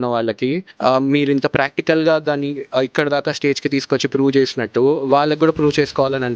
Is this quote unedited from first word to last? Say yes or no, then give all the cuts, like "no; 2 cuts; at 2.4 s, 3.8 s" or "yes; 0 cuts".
yes; 0 cuts